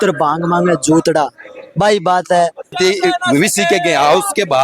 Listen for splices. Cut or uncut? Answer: cut